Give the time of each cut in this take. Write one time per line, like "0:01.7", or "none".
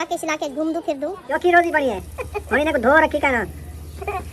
0:01.3